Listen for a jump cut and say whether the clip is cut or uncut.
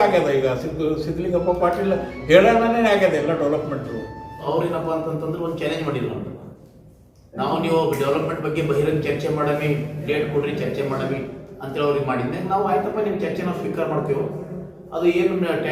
cut